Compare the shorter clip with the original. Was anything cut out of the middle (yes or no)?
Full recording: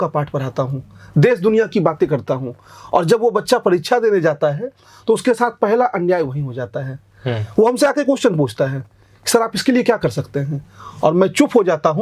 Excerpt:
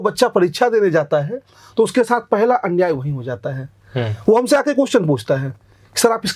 no